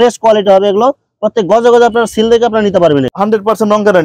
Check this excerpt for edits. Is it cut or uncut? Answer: cut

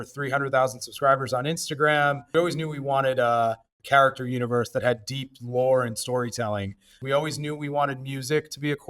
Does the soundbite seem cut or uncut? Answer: cut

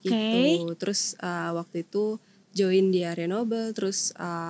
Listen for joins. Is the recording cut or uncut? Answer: uncut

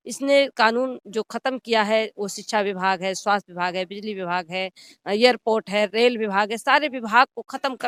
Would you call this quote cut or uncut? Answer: uncut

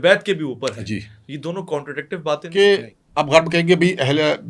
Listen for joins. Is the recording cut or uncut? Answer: cut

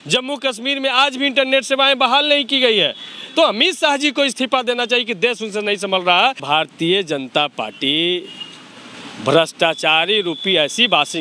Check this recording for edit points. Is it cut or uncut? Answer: cut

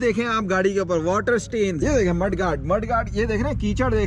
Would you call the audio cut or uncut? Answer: cut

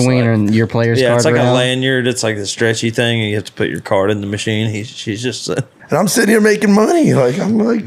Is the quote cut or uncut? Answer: cut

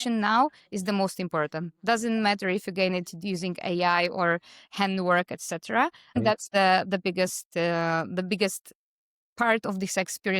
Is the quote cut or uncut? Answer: cut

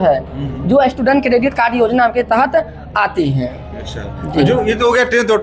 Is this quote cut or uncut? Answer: uncut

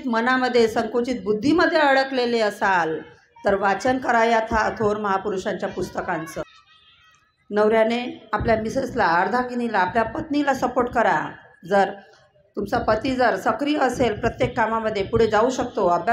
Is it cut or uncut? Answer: cut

